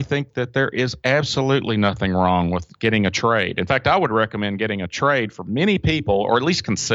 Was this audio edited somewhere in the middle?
no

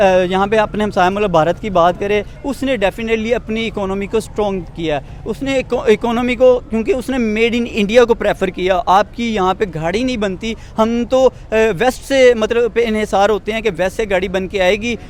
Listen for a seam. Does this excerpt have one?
no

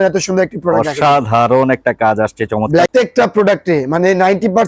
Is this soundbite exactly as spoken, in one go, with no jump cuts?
no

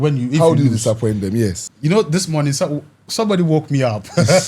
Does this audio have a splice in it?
yes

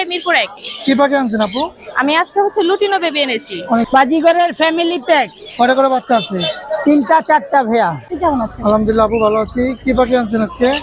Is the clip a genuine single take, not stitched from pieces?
no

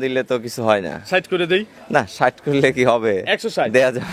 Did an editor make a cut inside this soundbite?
no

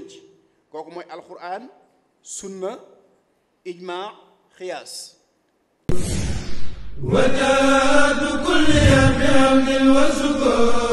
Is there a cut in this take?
yes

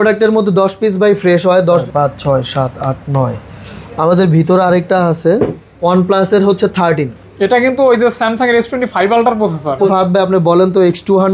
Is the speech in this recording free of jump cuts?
no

